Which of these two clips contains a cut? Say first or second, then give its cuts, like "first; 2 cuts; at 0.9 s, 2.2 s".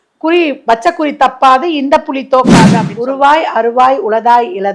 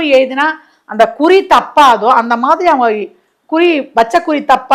first; 1 cut; at 2.9 s